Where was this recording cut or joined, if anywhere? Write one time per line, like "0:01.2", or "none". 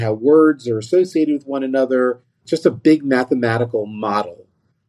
0:02.3